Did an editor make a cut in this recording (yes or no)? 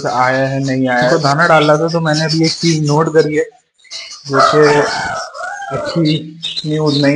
yes